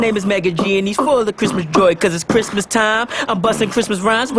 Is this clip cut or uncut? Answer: cut